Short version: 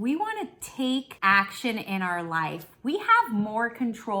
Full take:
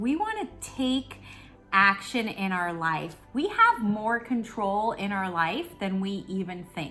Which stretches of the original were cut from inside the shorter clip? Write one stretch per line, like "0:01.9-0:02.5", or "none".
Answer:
0:01.1-0:01.6